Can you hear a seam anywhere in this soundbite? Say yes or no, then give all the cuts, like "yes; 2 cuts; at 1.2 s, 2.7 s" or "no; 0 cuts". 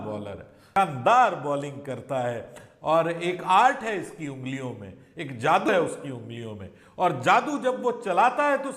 no; 0 cuts